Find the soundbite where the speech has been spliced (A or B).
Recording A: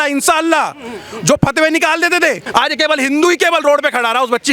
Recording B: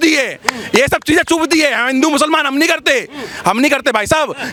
A